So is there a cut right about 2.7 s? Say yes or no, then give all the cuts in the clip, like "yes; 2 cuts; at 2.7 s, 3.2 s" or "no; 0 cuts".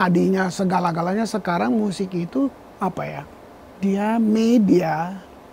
yes; 1 cut; at 2.7 s